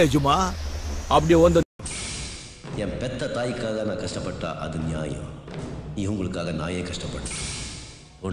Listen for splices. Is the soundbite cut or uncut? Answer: cut